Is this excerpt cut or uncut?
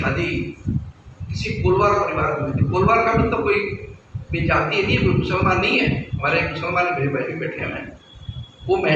uncut